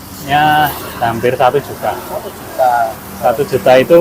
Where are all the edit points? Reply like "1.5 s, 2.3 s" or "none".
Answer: 3.0 s